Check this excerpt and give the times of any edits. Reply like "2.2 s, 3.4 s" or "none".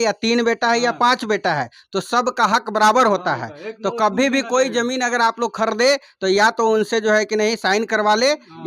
none